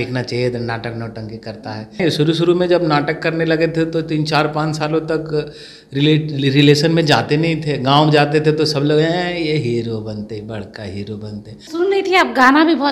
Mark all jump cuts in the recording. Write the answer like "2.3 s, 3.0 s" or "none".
2.0 s, 11.7 s